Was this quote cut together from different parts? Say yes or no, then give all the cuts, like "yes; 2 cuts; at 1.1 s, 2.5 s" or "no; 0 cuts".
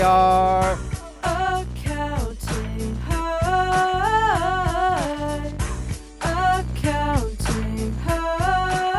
no; 0 cuts